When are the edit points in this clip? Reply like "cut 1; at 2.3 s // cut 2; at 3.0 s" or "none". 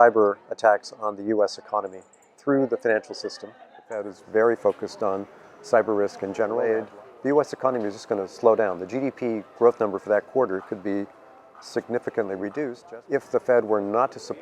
cut 1; at 4.1 s // cut 2; at 6.6 s // cut 3; at 12.8 s